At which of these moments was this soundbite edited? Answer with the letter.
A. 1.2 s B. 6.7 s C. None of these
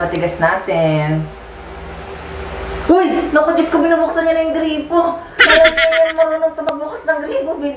C